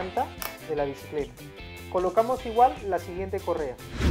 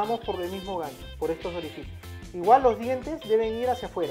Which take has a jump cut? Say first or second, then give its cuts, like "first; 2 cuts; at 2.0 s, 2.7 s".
first; 1 cut; at 1.7 s